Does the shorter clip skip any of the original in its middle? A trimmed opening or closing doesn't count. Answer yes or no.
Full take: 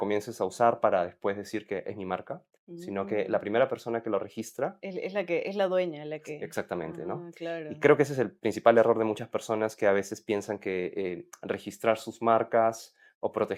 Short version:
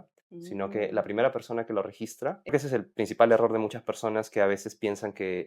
yes